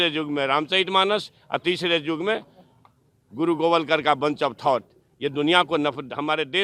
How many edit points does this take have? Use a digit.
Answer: 0